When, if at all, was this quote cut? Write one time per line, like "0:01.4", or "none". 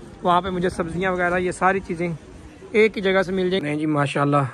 0:03.6